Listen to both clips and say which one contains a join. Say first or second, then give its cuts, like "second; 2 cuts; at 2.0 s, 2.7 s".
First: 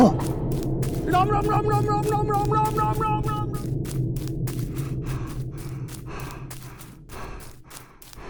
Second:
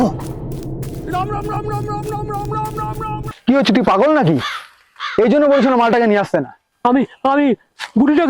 second; 1 cut; at 3.3 s